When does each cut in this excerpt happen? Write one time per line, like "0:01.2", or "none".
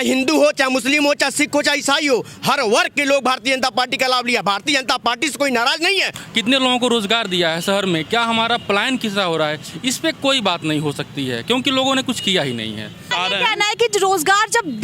0:06.1
0:13.1